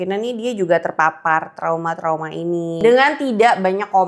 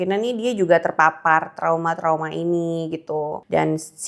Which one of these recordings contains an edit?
first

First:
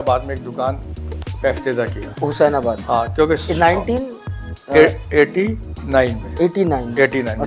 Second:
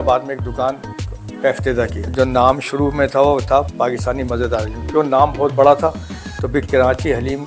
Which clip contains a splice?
second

